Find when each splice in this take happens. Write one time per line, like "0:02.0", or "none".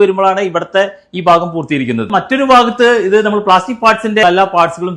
0:02.1
0:04.2